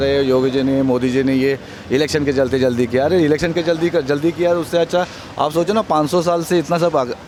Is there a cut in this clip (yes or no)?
no